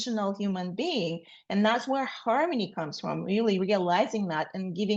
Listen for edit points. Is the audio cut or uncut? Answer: uncut